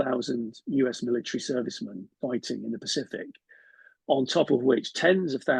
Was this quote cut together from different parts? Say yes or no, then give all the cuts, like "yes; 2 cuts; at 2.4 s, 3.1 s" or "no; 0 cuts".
no; 0 cuts